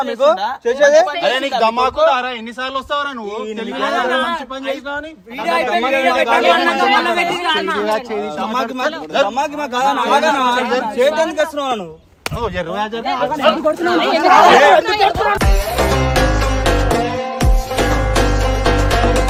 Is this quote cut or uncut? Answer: uncut